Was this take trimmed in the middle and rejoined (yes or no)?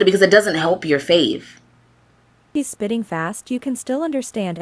yes